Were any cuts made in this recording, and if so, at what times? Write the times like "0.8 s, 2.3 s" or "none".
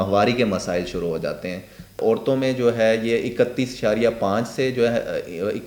2.0 s